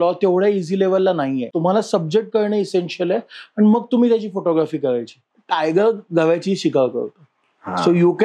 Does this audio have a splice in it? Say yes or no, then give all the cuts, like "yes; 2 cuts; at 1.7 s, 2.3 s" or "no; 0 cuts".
yes; 2 cuts; at 1.5 s, 5.1 s